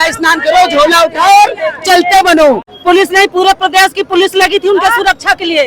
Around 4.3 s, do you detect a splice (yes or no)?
no